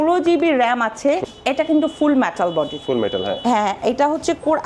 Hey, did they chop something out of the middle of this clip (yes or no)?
yes